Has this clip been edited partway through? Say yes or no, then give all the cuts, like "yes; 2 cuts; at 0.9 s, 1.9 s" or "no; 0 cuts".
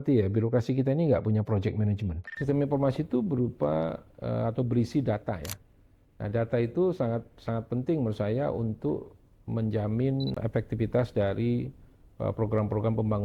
yes; 2 cuts; at 2.3 s, 10.4 s